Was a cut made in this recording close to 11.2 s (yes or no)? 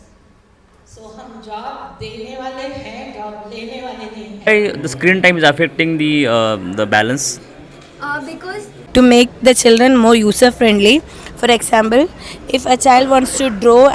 no